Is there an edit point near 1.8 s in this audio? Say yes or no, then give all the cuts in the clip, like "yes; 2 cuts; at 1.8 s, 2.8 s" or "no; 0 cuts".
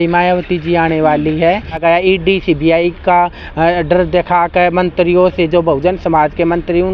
yes; 1 cut; at 1.8 s